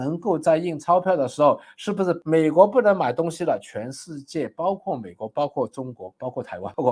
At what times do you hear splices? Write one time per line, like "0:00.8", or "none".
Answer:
0:02.2